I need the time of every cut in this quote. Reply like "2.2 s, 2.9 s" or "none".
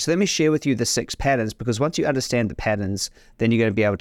none